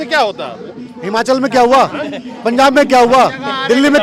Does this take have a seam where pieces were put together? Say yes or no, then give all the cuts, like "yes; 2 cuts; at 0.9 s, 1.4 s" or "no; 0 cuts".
no; 0 cuts